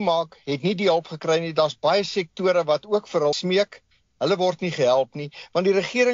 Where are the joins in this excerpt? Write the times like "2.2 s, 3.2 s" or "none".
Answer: 3.4 s